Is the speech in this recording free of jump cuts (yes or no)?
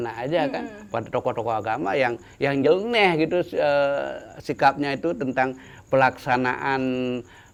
yes